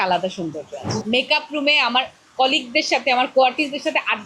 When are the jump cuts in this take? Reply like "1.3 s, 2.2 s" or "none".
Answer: 1.0 s